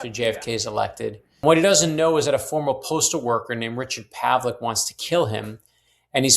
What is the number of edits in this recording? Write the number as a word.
one